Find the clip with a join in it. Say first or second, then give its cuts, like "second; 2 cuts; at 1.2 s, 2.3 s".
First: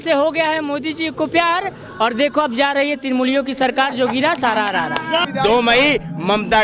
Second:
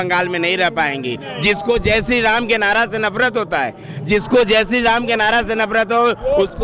first; 1 cut; at 5.2 s